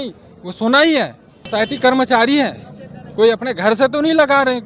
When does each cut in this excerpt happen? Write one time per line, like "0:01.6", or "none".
0:01.4